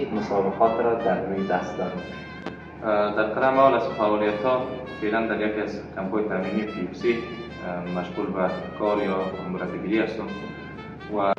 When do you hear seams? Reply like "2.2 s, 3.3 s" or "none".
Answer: none

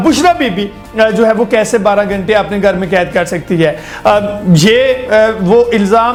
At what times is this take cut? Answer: none

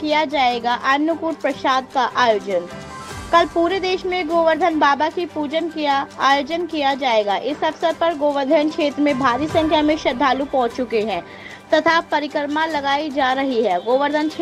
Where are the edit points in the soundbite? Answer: none

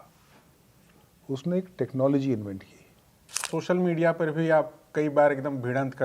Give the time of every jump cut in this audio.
3.5 s

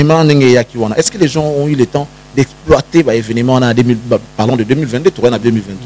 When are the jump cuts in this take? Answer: none

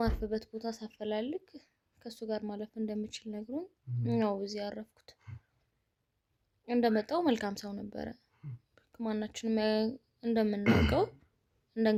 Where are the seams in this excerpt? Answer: none

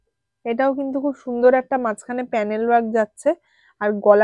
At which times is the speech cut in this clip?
none

